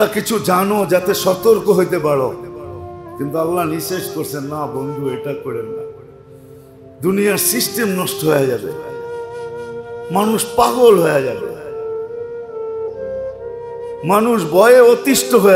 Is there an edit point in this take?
yes; 2 cuts; at 11.5 s, 13.3 s

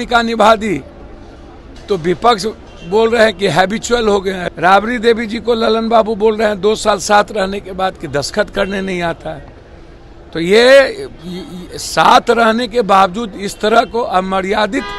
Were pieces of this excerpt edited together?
yes; 1 cut; at 4.4 s

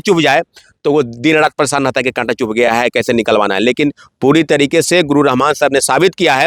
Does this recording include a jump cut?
no; 0 cuts

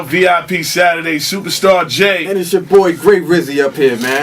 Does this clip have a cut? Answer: no; 0 cuts

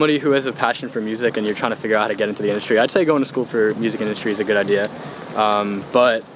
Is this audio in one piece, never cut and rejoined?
yes; 0 cuts

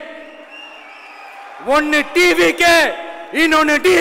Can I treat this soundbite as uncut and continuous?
yes; 0 cuts

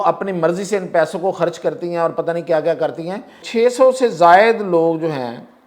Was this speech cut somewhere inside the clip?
yes; 1 cut; at 3.4 s

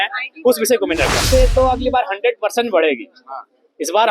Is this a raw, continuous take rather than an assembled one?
no; 1 cut; at 1.2 s

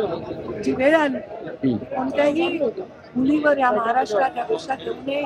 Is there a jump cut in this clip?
no; 0 cuts

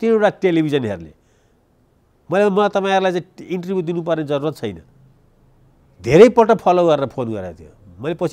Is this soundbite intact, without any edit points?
yes; 0 cuts

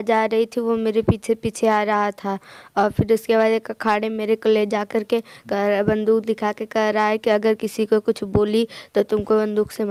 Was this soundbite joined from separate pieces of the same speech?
no; 0 cuts

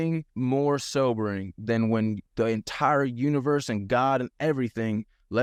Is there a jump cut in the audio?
no; 0 cuts

